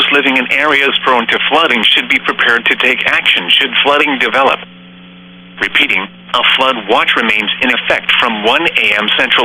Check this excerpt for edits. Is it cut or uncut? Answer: uncut